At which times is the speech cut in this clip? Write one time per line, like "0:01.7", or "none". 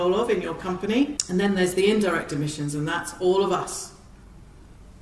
0:01.2